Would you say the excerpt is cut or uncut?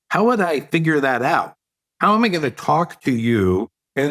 uncut